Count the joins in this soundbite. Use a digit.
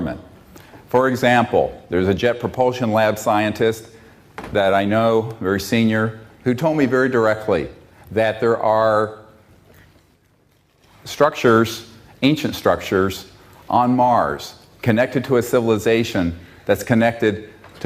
1